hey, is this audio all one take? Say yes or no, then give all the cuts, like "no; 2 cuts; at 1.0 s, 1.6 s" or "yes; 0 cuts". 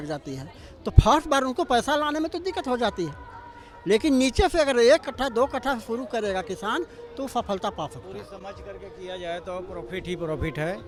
yes; 0 cuts